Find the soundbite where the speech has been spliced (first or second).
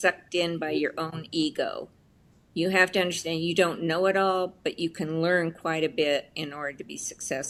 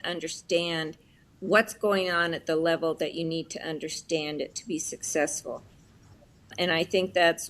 second